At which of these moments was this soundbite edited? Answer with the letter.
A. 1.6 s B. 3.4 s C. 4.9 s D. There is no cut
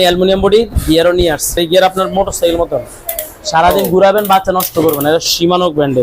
A